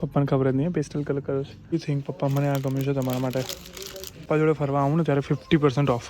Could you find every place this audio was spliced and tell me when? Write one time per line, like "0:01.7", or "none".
0:01.6
0:04.1